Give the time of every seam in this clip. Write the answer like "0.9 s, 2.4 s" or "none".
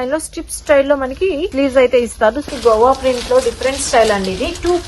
1.5 s, 2.5 s